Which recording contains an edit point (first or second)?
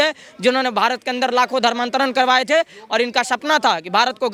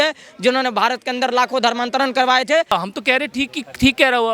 second